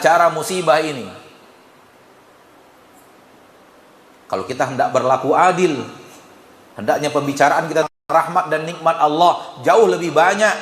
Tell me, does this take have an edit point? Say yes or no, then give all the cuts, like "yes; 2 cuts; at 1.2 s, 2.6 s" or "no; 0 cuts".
no; 0 cuts